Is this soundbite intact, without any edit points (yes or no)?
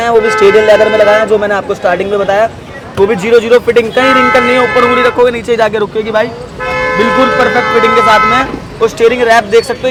yes